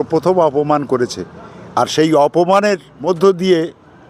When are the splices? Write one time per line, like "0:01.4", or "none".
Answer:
0:02.9